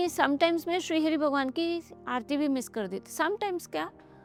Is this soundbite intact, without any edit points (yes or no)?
yes